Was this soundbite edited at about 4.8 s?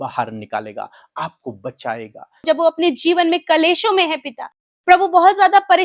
no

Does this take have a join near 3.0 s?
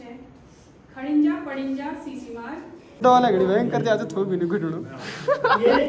yes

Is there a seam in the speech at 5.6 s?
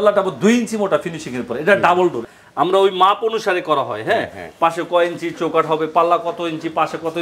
no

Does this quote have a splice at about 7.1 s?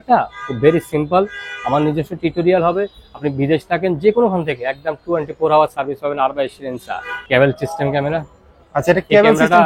yes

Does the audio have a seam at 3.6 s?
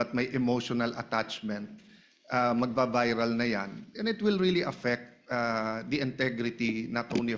no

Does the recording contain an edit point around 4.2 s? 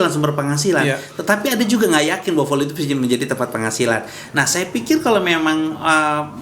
yes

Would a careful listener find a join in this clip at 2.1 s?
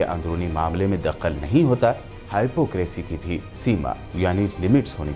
yes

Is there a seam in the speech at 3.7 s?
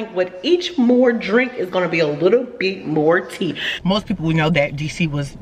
yes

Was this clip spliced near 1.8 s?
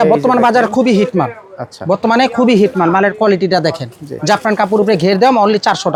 no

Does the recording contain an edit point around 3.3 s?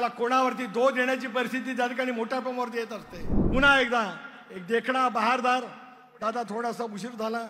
yes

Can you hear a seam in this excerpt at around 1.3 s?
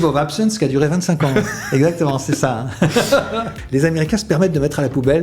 no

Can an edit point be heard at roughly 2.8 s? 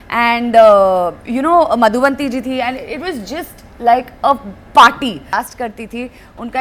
no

